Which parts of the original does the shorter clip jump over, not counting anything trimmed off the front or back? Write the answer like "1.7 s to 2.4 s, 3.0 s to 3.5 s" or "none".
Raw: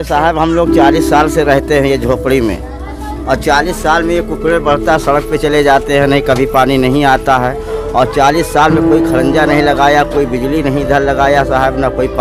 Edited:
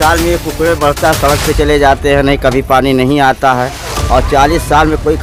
none